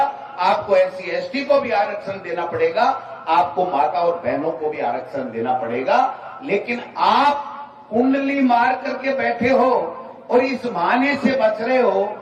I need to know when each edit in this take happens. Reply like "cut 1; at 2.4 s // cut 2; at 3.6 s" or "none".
none